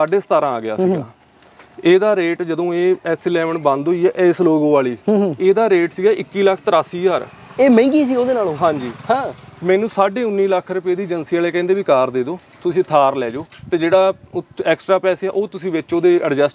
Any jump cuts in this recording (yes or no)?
no